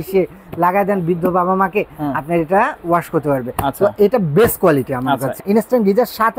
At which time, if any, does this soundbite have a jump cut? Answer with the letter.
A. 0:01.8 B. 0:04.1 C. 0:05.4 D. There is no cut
C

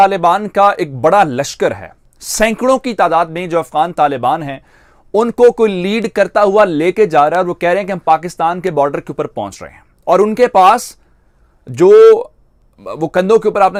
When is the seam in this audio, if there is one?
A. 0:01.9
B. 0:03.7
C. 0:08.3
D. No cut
D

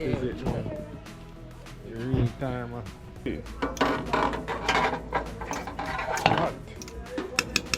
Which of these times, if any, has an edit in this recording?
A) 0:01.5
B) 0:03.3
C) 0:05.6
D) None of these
B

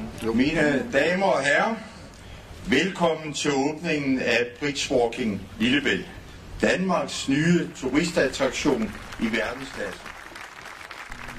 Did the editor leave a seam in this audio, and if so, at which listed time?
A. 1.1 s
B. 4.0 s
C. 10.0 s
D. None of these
C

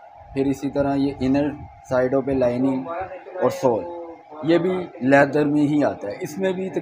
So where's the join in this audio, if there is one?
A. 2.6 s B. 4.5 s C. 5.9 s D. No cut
D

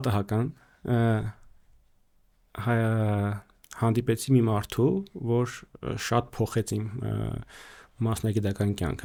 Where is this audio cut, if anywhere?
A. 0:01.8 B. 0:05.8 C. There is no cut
C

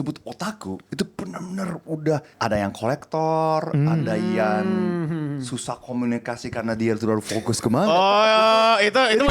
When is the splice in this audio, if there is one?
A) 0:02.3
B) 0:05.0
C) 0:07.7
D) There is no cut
A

